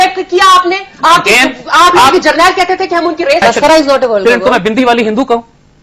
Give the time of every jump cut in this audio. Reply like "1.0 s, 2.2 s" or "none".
3.4 s